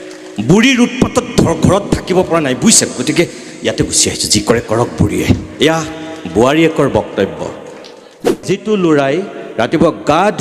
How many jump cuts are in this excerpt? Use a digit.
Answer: 1